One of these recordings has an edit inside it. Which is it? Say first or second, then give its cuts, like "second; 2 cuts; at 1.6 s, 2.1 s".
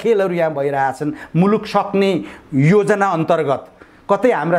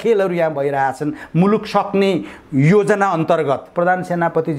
second; 1 cut; at 3.7 s